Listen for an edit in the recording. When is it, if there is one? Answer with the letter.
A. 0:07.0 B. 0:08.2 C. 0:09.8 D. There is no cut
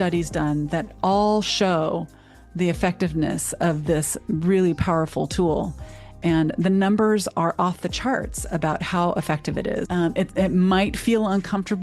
C